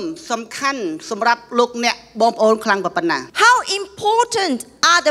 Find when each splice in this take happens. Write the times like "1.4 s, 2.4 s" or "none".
3.3 s